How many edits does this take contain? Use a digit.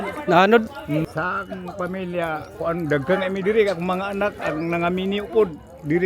1